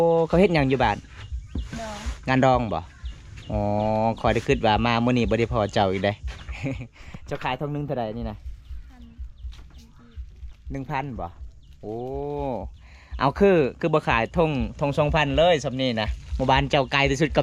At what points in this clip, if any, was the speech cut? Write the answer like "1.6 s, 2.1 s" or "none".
none